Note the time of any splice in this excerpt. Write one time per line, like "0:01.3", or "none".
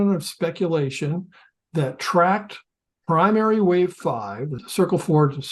0:04.6